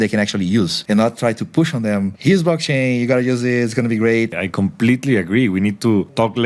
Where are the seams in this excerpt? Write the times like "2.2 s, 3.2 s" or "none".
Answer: 4.4 s